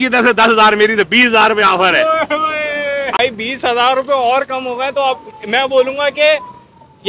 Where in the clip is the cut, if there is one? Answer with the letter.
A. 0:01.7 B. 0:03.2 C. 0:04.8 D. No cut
B